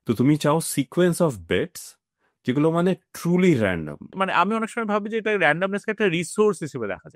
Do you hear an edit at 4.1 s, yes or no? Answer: yes